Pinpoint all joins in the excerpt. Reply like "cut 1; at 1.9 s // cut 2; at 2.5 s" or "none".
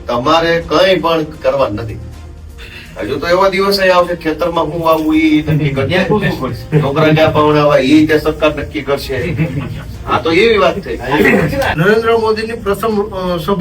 cut 1; at 11.7 s